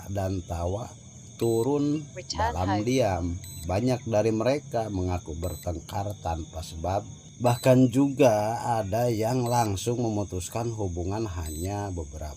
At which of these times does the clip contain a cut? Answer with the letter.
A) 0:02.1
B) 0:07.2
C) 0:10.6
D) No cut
B